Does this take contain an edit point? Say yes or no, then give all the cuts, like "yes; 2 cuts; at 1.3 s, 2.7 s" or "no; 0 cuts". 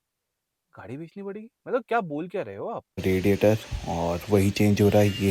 yes; 1 cut; at 3.0 s